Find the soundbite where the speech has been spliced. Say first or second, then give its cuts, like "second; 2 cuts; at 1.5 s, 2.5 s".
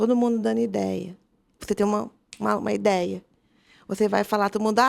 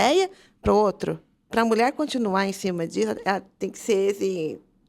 second; 1 cut; at 1.5 s